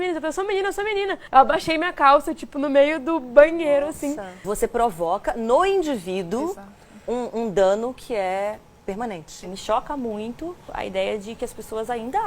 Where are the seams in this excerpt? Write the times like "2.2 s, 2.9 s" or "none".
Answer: 1.2 s, 4.4 s, 9.5 s, 10.6 s